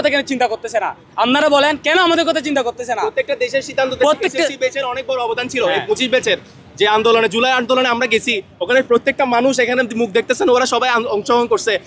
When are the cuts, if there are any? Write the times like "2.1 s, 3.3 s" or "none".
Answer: none